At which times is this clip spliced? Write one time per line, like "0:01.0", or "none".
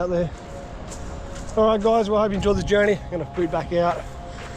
none